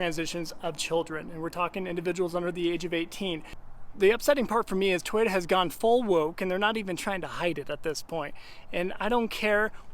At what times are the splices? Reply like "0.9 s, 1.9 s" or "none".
3.6 s

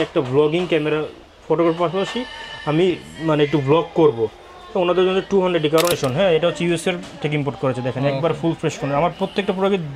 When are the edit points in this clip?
5.9 s

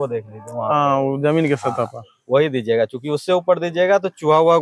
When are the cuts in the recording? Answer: none

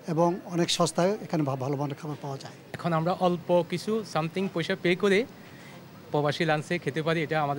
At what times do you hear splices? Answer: 2.7 s

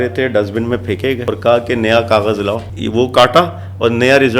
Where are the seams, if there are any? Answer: 1.2 s, 2.6 s

